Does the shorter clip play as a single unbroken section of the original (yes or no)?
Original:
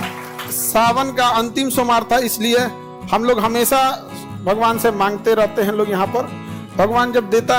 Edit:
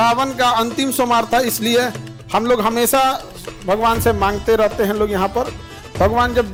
yes